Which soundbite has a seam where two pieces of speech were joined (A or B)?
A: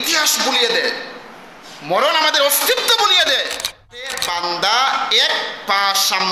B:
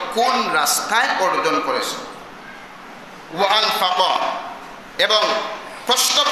A